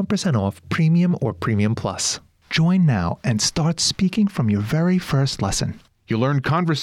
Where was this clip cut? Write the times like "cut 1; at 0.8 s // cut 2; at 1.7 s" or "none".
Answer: cut 1; at 2.1 s